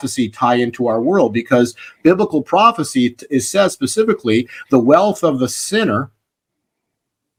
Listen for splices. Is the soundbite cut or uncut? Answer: uncut